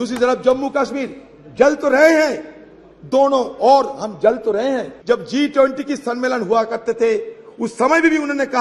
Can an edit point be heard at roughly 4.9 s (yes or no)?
yes